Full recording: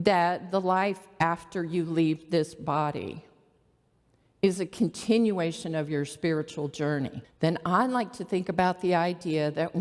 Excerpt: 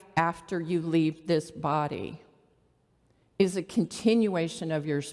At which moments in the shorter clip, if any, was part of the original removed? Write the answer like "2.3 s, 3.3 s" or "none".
none